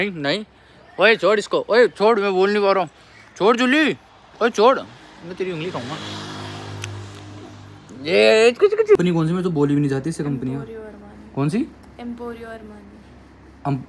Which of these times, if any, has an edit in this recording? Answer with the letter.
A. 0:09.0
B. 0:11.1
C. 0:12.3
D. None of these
A